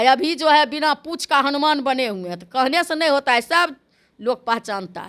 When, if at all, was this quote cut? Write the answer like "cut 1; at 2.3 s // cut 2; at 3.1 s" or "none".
none